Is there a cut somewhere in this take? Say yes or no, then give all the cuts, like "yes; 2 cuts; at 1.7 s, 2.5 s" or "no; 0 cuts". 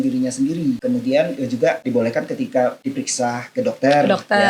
yes; 3 cuts; at 0.8 s, 1.9 s, 2.8 s